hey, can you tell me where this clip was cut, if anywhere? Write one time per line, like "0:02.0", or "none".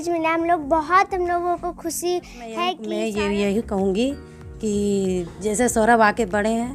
0:02.8